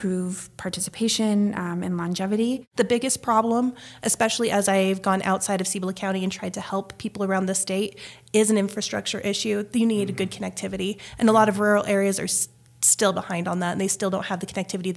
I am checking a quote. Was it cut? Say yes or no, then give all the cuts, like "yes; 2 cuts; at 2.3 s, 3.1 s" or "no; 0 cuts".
yes; 1 cut; at 2.7 s